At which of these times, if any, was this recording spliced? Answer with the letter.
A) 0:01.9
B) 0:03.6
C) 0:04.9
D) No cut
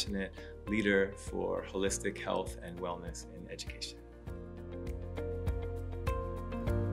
B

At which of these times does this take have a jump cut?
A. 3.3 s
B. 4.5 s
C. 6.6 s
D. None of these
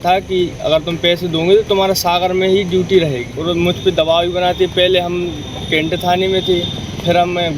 A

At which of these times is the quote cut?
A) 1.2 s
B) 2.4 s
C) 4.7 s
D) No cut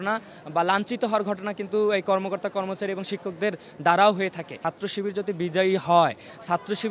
C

